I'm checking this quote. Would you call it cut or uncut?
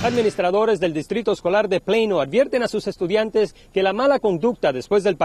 uncut